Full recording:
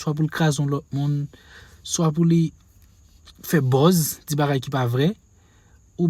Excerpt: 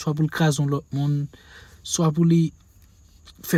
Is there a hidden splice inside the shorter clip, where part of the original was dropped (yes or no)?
no